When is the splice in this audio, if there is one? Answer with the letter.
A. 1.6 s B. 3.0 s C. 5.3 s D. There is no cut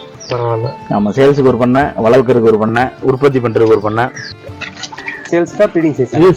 C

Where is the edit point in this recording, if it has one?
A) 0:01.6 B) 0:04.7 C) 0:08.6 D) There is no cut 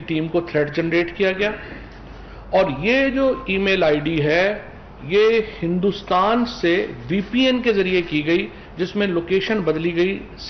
D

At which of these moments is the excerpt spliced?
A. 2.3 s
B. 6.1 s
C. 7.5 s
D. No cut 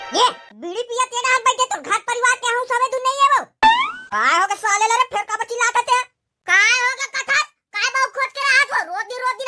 D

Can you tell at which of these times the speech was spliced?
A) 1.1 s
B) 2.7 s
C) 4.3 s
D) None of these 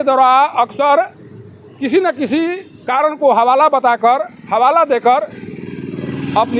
D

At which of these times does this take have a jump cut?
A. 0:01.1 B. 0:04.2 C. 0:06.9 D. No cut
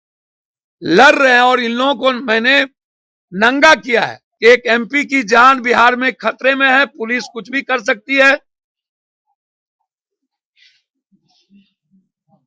B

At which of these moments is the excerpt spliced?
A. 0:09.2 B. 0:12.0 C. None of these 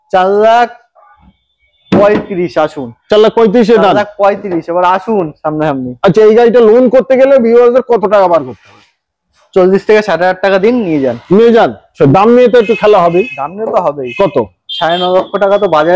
B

